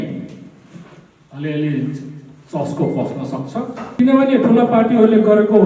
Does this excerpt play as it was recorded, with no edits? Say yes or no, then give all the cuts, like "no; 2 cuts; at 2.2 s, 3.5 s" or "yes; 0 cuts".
no; 1 cut; at 3.8 s